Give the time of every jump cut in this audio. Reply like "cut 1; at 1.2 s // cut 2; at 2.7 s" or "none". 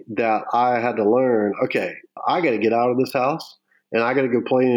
none